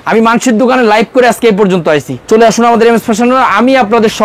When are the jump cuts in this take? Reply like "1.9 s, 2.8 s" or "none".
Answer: 2.1 s